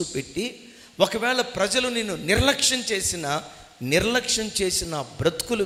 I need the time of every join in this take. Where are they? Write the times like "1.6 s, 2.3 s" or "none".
none